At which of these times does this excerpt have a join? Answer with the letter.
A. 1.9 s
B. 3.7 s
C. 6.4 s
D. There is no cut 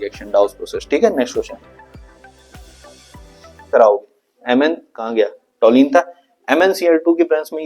B